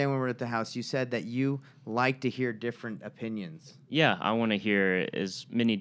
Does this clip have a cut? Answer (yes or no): no